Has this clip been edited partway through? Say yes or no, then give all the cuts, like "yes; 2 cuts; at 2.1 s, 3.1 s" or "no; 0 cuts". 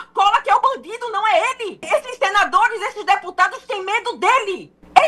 yes; 1 cut; at 1.8 s